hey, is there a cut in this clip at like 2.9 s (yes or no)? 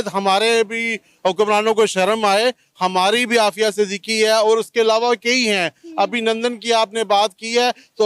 no